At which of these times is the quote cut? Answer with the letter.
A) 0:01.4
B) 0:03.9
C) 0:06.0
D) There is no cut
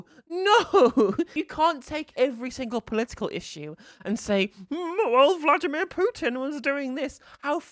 A